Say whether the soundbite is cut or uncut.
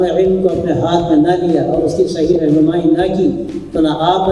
uncut